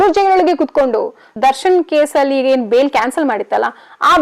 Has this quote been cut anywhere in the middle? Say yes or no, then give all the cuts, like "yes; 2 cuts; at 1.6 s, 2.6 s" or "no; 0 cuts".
yes; 1 cut; at 1.3 s